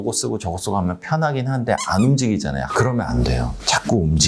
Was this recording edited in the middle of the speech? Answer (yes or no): yes